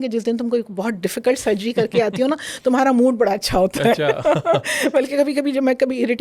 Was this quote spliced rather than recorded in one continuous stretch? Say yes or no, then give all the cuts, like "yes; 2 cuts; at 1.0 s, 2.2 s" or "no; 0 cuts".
no; 0 cuts